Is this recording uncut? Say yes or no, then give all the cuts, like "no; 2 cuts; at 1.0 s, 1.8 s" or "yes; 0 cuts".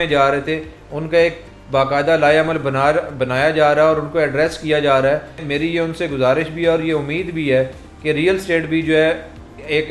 yes; 0 cuts